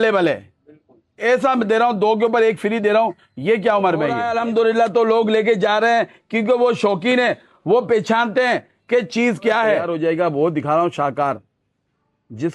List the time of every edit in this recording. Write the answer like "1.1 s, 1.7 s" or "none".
4.2 s, 9.8 s